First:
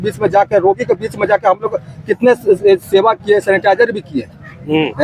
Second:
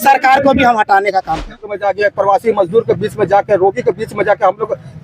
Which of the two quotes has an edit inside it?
second; 1 cut; at 1.5 s

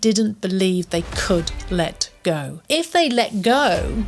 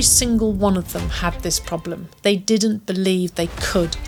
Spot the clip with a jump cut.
first; 1 cut; at 2.6 s

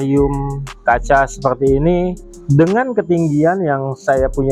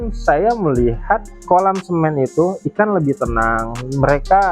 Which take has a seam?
second; 1 cut; at 1.3 s

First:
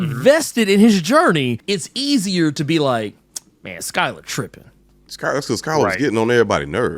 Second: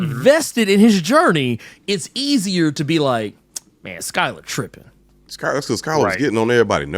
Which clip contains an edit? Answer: first; 1 cut; at 1.6 s

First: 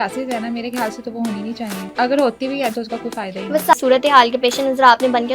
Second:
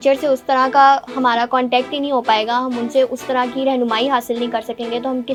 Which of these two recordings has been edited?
first; 2 cuts; at 1.9 s, 3.7 s

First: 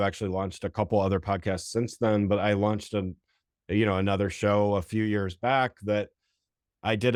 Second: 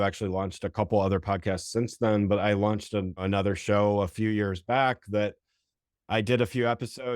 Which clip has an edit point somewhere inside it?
second; 1 cut; at 3.2 s

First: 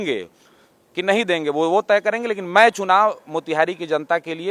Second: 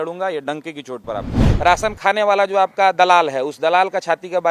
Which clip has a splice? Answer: second; 1 cut; at 1.4 s

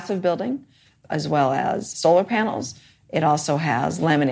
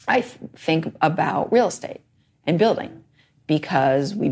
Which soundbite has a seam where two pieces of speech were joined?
first; 2 cuts; at 1.0 s, 1.9 s

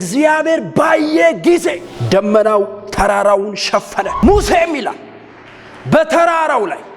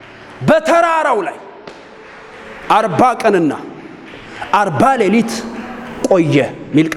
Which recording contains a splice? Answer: first; 2 cuts; at 1.9 s, 4.1 s

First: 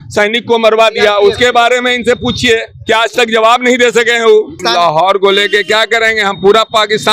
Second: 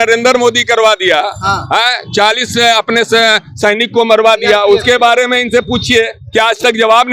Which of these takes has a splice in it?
first; 1 cut; at 4.6 s

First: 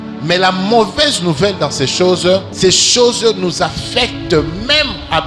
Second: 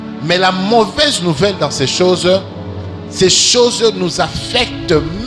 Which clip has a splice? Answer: first; 1 cut; at 2.5 s

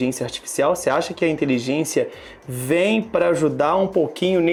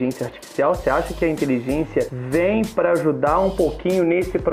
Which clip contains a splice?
second; 1 cut; at 2.2 s

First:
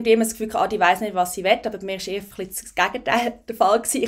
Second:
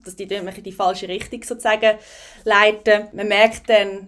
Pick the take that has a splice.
second; 1 cut; at 3.1 s

